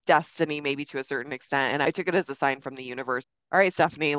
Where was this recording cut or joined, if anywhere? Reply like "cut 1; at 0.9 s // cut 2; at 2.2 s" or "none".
cut 1; at 1.8 s // cut 2; at 3.3 s